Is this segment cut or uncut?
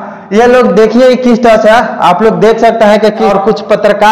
uncut